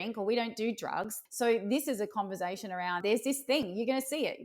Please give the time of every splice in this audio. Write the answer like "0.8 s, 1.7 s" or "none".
1.2 s, 3.0 s

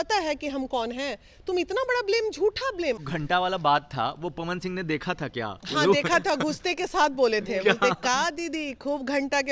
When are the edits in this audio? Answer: 3.1 s

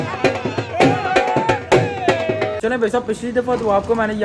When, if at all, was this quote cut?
2.6 s

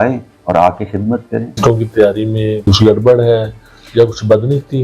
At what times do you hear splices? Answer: 1.5 s

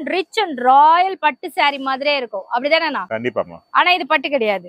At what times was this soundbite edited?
none

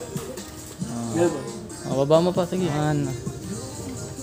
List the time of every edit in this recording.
2.7 s

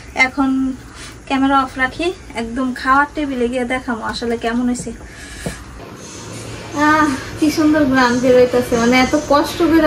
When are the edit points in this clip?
none

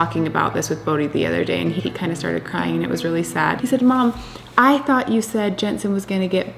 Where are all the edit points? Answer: 1.8 s, 3.6 s

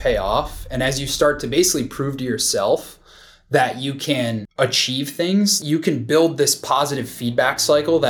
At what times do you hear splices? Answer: 5.6 s

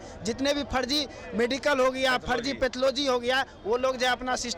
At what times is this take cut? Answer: none

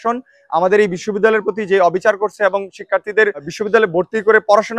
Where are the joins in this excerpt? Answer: 3.5 s

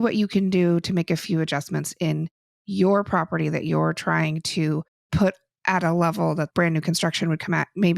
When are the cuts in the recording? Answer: 5.0 s, 6.5 s

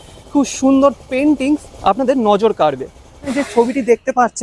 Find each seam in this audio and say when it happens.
3.3 s

